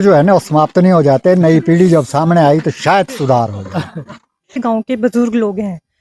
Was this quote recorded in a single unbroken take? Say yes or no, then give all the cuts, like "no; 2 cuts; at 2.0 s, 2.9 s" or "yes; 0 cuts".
no; 1 cut; at 4.6 s